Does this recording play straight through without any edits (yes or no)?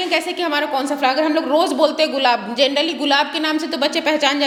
yes